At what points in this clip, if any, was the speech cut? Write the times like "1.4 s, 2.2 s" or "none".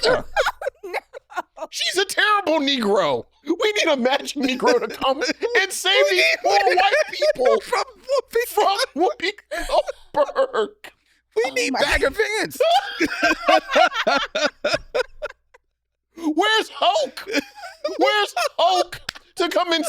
3.3 s